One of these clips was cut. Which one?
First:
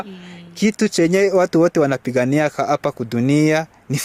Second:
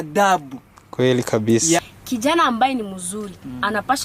second; 1 cut; at 1.8 s

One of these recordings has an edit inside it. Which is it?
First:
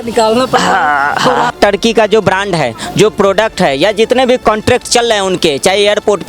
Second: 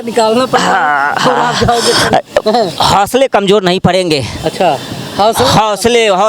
first; 1 cut; at 1.5 s

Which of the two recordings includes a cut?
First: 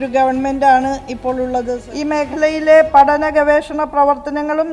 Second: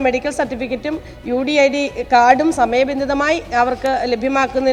first; 1 cut; at 1.8 s

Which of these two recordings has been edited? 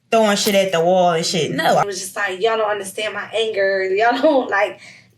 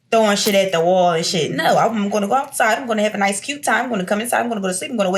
first; 1 cut; at 1.8 s

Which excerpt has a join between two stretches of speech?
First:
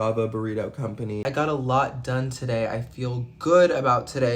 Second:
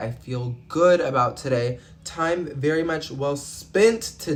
first; 1 cut; at 1.2 s

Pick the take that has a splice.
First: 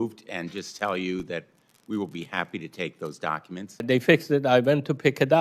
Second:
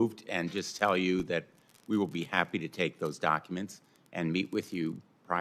first; 1 cut; at 3.8 s

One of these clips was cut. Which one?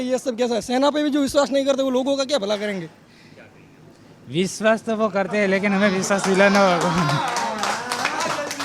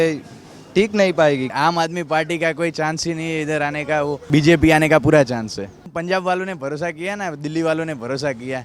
second; 3 cuts; at 1.5 s, 4.2 s, 5.9 s

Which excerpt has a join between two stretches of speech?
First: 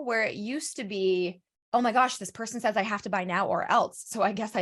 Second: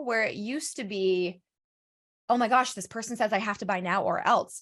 first; 1 cut; at 1.5 s

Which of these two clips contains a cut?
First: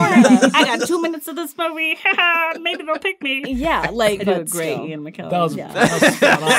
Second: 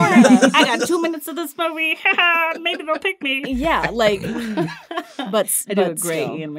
first; 1 cut; at 4.2 s

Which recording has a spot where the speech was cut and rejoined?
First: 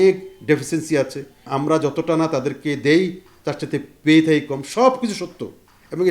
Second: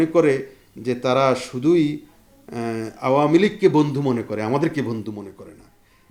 first; 1 cut; at 1.5 s

